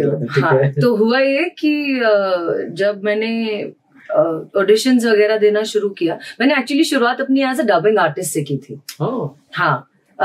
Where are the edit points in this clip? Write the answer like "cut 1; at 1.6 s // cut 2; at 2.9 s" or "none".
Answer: none